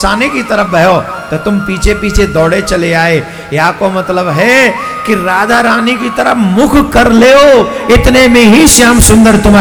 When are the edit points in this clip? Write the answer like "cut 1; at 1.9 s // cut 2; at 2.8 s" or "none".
none